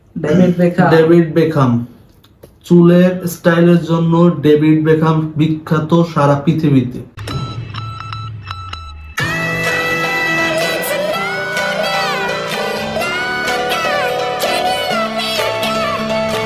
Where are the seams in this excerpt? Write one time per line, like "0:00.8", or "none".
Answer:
none

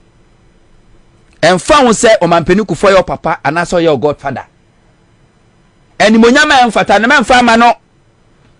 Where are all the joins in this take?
none

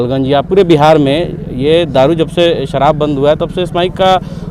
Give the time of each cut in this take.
none

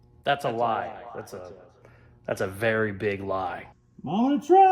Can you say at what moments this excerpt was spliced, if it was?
0:03.7

